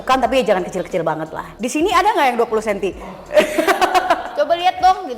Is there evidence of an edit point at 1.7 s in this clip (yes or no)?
yes